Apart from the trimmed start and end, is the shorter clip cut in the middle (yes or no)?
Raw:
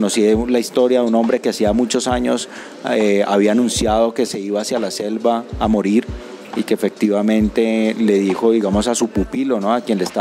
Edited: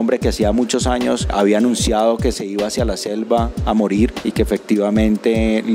yes